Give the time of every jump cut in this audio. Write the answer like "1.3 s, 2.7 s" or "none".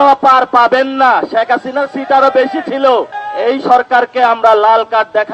3.2 s

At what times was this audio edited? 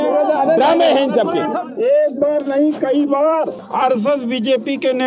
1.5 s, 3.6 s

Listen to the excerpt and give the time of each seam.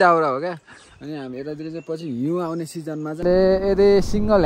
3.2 s

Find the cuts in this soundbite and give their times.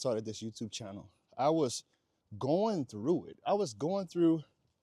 none

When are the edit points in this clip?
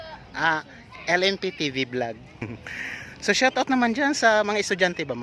2.4 s

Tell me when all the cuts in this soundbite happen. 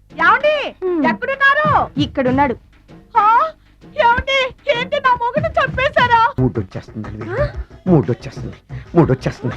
6.3 s

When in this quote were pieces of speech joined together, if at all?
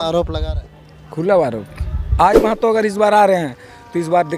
2.3 s

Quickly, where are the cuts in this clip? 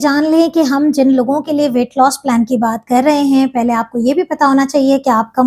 none

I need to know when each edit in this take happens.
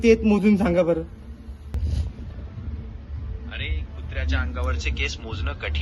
1.7 s

